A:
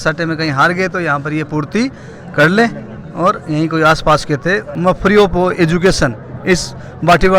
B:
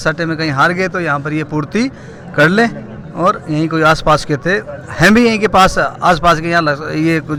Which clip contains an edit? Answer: A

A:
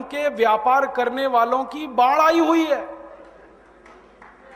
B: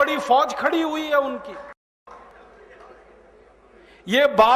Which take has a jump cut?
B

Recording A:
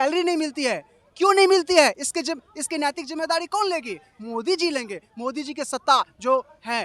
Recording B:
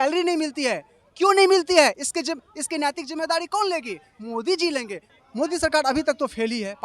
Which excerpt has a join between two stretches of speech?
B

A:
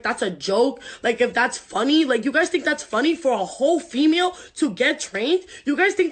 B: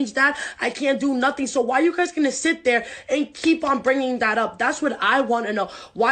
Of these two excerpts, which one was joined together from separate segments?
B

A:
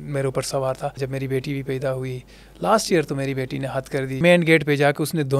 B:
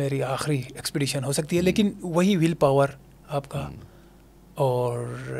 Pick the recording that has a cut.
A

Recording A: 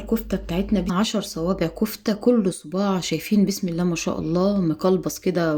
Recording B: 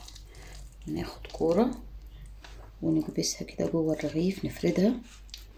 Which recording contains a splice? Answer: A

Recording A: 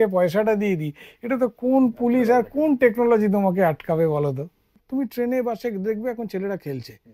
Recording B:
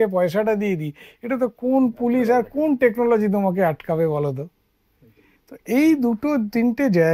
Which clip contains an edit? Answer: A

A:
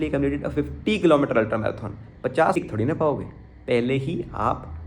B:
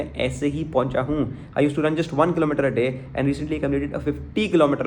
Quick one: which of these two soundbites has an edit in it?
A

